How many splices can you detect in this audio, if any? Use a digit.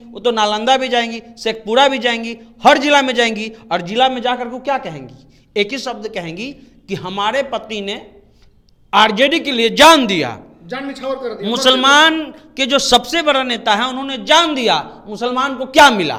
0